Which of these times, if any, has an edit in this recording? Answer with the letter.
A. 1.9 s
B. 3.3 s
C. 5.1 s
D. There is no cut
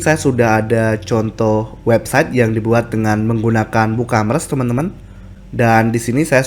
D